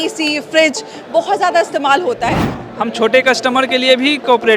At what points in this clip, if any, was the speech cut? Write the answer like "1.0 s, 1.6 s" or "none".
2.6 s